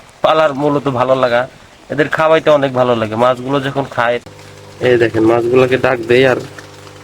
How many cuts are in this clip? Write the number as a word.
one